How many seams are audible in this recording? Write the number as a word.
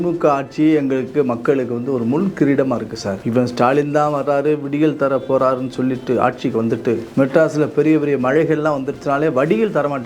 two